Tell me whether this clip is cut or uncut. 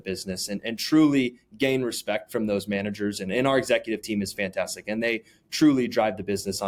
uncut